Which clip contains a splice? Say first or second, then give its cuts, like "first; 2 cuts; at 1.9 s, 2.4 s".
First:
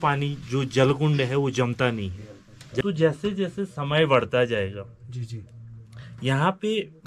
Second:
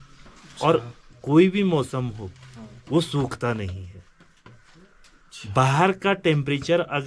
first; 1 cut; at 2.8 s